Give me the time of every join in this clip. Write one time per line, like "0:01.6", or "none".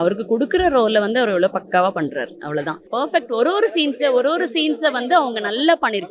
0:02.9